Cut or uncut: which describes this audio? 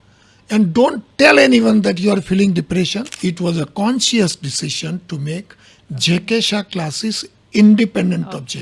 cut